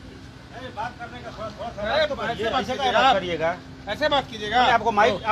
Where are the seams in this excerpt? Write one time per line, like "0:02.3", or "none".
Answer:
none